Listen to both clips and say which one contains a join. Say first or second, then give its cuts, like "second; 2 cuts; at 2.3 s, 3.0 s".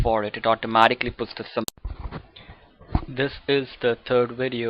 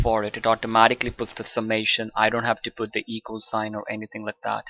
second; 1 cut; at 1.7 s